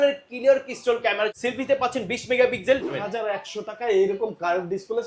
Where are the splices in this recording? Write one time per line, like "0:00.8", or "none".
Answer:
0:01.3
0:02.9